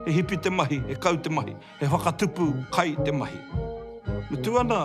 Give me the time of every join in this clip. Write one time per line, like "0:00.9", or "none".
0:01.6
0:03.9

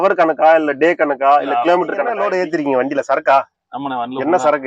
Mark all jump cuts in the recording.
0:02.2

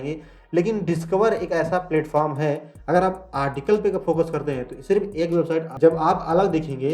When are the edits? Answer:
0:05.7

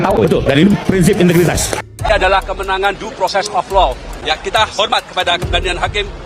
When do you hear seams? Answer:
0:02.0
0:04.1

